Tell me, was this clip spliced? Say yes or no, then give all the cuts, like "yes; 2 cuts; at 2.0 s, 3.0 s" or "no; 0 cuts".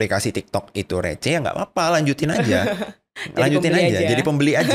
no; 0 cuts